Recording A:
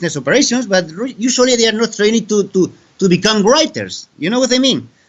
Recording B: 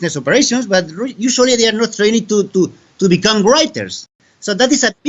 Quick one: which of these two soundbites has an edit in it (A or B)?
B